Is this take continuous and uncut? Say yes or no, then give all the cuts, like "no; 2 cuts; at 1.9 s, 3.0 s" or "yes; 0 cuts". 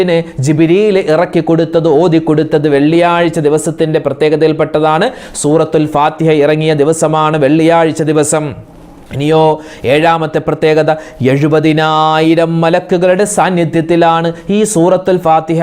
yes; 0 cuts